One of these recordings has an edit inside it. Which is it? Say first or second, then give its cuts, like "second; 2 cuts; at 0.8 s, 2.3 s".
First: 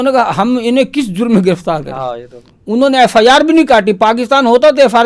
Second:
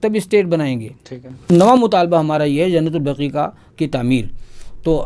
second; 1 cut; at 1.5 s